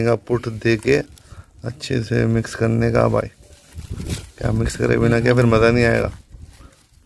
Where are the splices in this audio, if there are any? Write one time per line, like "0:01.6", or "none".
none